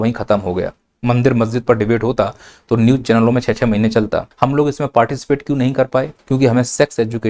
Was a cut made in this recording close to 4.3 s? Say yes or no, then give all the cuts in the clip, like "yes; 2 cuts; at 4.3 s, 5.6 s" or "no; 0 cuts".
yes; 2 cuts; at 4.3 s, 6.2 s